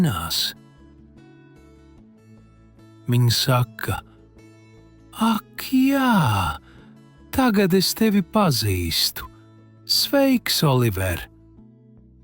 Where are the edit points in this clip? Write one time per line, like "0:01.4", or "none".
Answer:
0:01.2
0:03.0
0:11.2

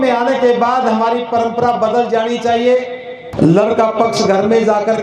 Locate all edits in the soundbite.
0:03.2

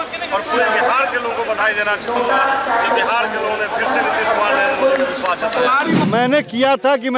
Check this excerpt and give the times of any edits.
0:06.0

